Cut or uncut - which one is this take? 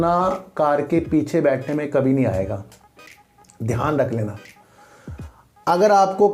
uncut